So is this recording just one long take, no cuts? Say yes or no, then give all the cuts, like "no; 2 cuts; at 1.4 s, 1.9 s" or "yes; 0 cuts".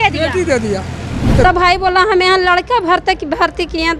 no; 1 cut; at 1.4 s